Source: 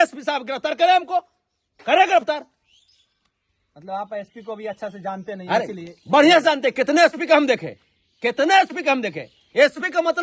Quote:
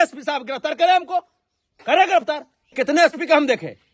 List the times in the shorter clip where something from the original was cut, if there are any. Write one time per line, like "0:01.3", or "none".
0:02.7

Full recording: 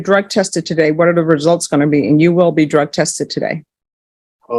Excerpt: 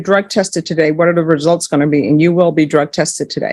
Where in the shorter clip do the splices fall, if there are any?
none

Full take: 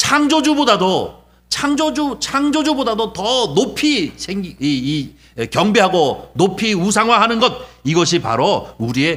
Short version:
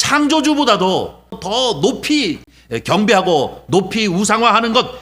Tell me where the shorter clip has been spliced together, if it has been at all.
0:01.4
0:02.5

